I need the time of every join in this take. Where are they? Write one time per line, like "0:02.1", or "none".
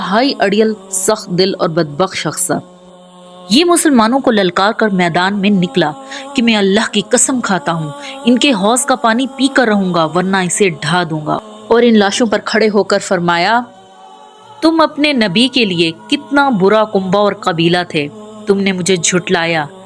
0:11.4

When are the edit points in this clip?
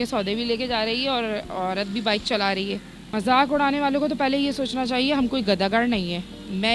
0:03.0

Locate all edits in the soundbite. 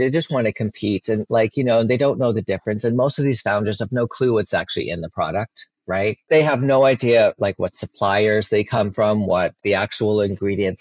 0:06.3
0:09.6

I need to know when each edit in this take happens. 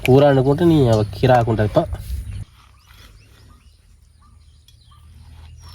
0:02.6

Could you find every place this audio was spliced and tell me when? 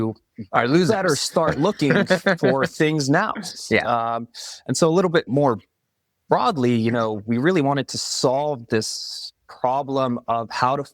none

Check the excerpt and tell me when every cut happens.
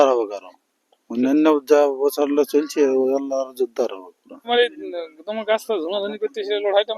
0:04.5

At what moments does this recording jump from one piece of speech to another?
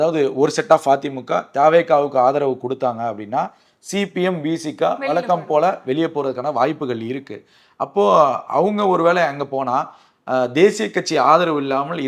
none

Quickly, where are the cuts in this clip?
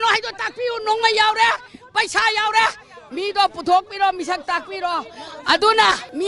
none

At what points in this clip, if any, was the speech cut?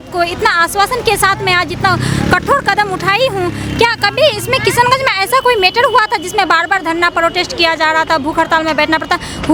none

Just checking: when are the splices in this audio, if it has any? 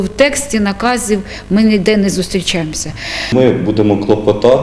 0:03.1

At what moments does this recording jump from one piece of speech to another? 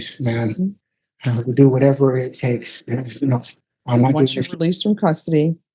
0:04.3

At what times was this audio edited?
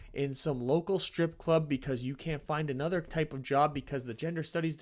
none

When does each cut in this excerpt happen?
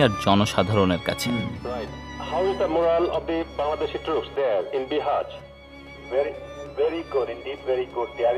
0:01.4

